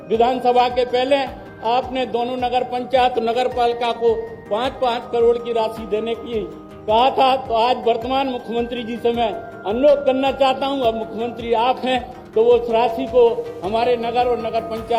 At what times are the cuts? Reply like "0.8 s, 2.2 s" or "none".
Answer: none